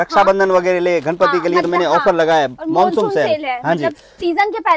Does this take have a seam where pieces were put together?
no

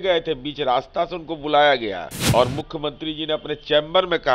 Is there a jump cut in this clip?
yes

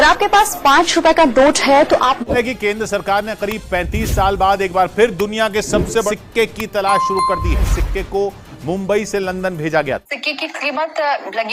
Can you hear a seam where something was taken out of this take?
yes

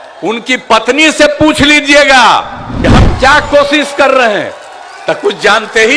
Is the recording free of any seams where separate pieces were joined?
no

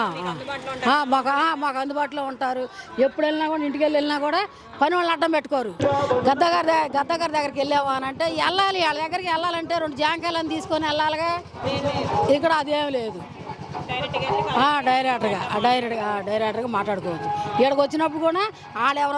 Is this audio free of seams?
no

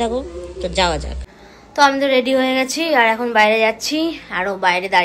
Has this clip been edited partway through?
yes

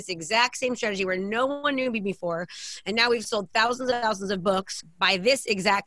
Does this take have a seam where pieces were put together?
yes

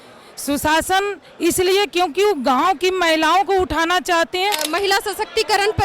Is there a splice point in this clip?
yes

